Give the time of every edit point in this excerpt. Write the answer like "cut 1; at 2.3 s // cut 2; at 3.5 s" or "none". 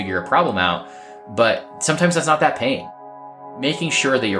cut 1; at 1.7 s // cut 2; at 3.4 s